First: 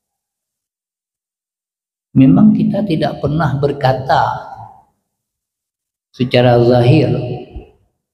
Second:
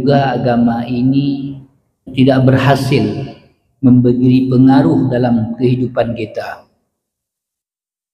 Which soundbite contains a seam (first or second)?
second